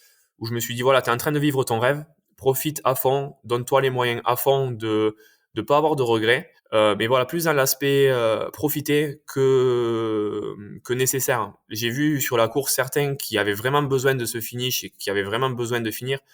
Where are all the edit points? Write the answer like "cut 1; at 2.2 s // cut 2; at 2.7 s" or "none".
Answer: none

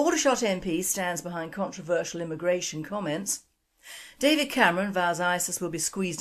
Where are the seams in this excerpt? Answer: cut 1; at 4.9 s

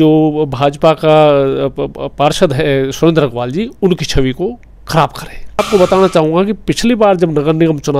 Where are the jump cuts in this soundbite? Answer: cut 1; at 5.6 s

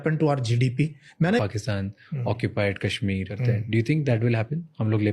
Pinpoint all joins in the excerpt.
cut 1; at 1.4 s // cut 2; at 3.3 s

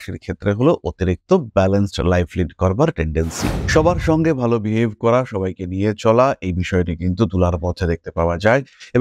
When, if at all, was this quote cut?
cut 1; at 3.6 s

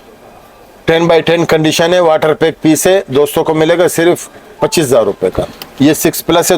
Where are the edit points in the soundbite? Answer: cut 1; at 5.6 s

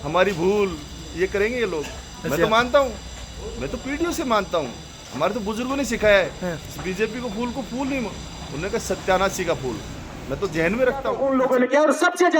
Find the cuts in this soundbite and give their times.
cut 1; at 11.0 s

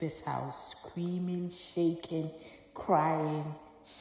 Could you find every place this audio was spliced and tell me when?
none

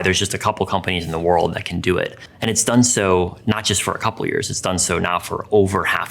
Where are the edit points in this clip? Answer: cut 1; at 2.3 s

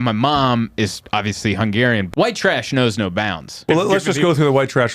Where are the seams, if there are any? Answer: cut 1; at 2.1 s // cut 2; at 3.6 s

